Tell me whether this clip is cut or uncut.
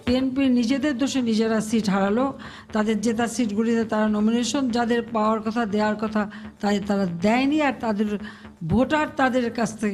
uncut